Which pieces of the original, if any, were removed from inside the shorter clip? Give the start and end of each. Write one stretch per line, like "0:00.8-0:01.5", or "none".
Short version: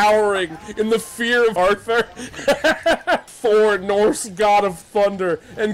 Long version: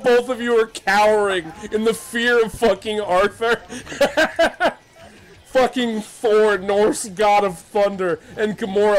0:02.5-0:03.1
0:04.8-0:06.1